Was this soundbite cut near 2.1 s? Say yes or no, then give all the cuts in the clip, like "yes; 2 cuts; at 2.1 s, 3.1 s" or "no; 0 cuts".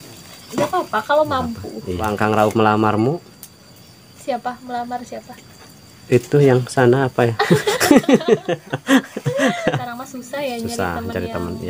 yes; 2 cuts; at 2.1 s, 9.8 s